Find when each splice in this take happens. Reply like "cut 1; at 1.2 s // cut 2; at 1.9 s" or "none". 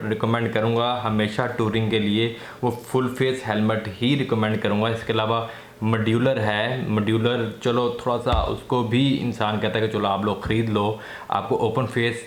none